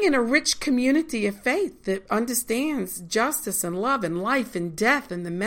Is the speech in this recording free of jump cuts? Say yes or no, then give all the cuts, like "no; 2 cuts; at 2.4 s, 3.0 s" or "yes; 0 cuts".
yes; 0 cuts